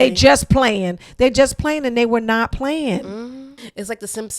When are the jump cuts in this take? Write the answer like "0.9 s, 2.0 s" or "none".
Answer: 3.4 s